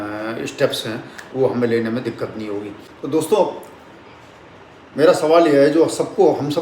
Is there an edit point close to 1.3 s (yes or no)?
no